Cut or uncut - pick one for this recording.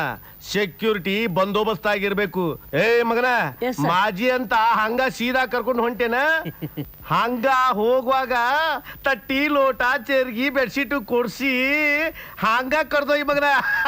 cut